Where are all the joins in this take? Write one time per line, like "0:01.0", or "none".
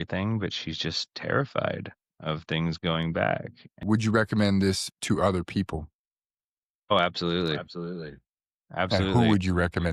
0:03.8